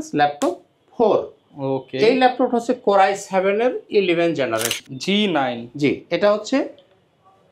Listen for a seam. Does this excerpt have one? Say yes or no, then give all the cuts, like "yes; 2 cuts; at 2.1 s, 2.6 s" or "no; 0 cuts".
yes; 1 cut; at 4.7 s